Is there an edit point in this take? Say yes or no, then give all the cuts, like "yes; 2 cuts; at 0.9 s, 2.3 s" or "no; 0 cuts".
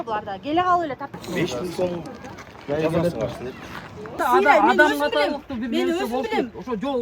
yes; 2 cuts; at 1.1 s, 4.2 s